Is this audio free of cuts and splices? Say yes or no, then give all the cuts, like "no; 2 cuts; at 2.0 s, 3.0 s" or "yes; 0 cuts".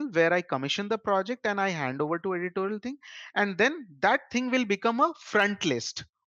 yes; 0 cuts